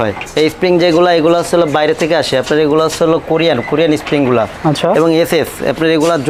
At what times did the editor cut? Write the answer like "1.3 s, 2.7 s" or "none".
none